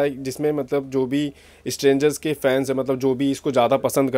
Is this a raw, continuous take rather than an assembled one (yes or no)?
yes